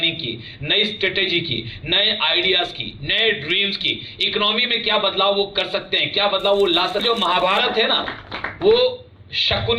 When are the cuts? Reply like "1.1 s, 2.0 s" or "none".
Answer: 7.0 s